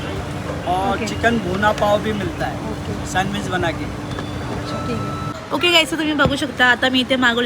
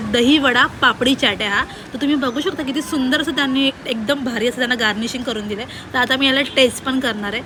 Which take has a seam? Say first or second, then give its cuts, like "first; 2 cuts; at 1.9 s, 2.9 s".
first; 1 cut; at 5.3 s